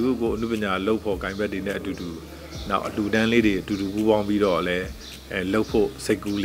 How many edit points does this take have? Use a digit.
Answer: 0